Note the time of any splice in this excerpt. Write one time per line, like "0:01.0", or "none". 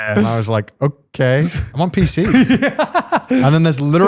0:01.7